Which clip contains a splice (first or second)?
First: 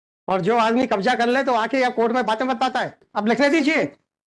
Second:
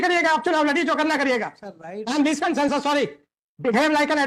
first